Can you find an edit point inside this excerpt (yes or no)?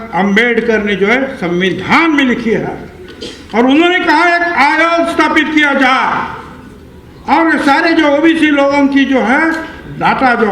no